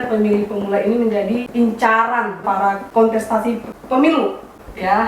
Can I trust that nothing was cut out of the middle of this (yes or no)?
no